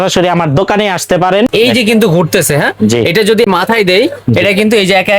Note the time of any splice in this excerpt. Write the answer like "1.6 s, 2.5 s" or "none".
1.5 s, 3.5 s